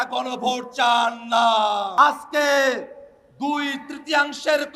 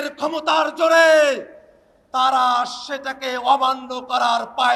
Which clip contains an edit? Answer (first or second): first